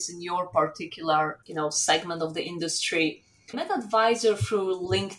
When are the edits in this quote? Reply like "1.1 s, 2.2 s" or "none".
1.4 s, 3.5 s